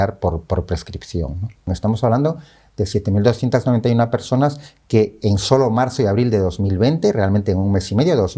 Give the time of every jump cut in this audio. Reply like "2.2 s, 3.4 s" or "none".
1.7 s